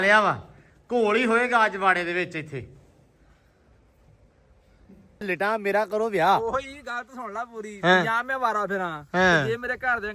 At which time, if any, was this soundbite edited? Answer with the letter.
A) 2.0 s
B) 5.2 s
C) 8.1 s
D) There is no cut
B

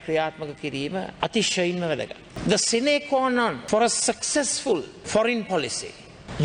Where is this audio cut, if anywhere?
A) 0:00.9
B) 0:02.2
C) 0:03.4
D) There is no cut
D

